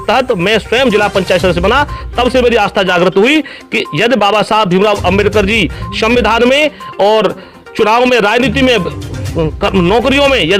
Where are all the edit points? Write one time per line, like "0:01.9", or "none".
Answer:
none